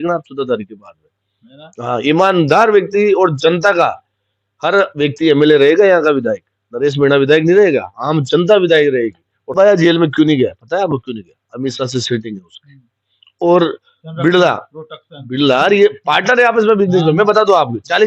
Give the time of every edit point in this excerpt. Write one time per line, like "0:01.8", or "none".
0:09.5